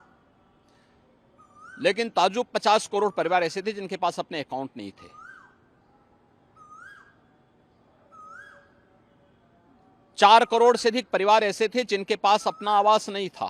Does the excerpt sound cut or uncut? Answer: uncut